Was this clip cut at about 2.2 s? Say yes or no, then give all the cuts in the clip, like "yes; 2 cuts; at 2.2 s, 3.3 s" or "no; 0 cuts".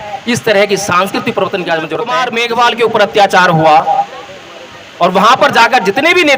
yes; 1 cut; at 2.2 s